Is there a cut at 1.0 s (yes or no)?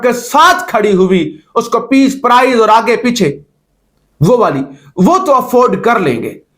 no